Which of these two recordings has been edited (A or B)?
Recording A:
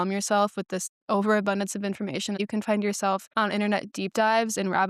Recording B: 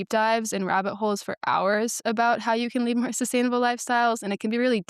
A